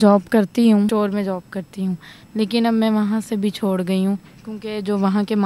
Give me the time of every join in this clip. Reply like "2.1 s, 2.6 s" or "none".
0.9 s